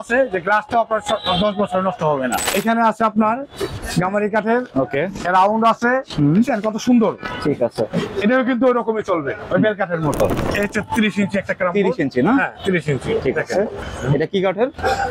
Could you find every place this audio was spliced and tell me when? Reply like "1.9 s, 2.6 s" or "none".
2.4 s, 3.8 s, 10.4 s, 13.8 s